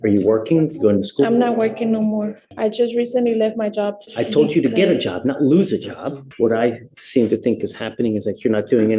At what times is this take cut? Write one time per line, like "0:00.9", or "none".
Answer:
0:02.4
0:04.0
0:06.2